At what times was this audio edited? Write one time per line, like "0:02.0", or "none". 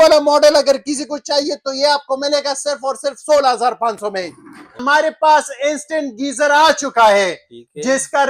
0:04.8